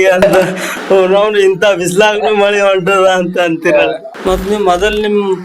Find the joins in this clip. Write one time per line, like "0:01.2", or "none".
0:04.0